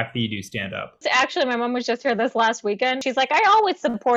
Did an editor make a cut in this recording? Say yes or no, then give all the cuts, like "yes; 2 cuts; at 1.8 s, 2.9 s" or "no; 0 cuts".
yes; 2 cuts; at 1.0 s, 3.0 s